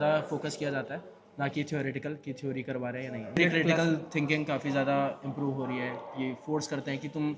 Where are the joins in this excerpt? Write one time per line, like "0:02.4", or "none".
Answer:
none